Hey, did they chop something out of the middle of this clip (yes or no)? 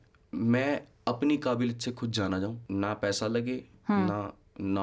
yes